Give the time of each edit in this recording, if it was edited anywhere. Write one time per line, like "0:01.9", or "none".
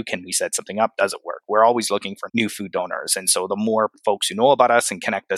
none